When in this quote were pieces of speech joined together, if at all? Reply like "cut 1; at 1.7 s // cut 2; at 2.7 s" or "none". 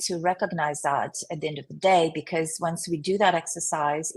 none

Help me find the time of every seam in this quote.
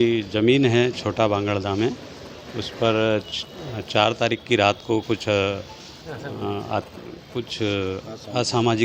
none

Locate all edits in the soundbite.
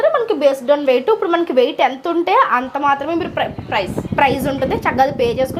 none

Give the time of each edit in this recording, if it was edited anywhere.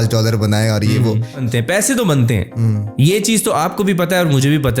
cut 1; at 1.5 s

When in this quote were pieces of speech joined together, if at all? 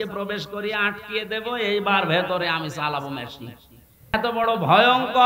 cut 1; at 4.1 s

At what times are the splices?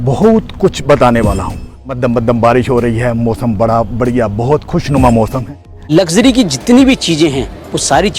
cut 1; at 2.0 s // cut 2; at 5.9 s

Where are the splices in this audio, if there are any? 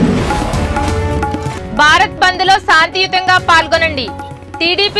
cut 1; at 1.5 s

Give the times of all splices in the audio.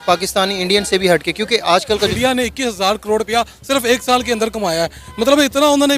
cut 1; at 2.1 s

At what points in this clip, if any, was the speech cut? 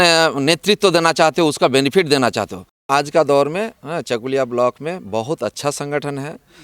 cut 1; at 2.9 s

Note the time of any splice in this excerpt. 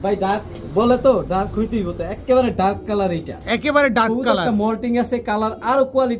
none

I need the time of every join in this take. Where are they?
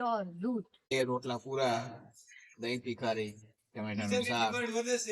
cut 1; at 0.9 s

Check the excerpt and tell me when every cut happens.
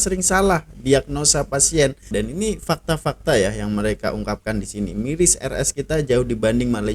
cut 1; at 2.1 s

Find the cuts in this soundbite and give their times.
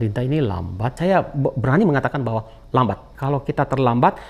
cut 1; at 1.0 s // cut 2; at 3.1 s

